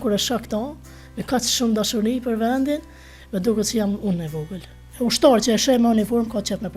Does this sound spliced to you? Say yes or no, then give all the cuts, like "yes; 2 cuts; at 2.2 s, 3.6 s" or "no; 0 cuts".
yes; 1 cut; at 4.8 s